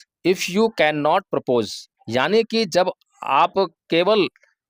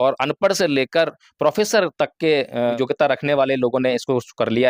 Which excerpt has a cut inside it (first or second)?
second